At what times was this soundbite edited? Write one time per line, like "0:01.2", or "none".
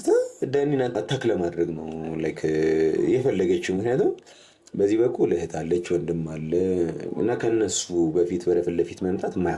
none